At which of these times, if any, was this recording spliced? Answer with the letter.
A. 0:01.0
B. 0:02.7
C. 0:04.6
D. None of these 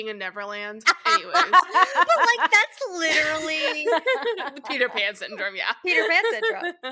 D